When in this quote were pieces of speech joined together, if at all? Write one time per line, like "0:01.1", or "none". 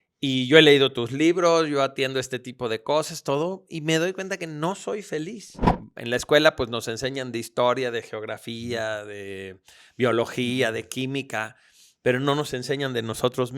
0:05.7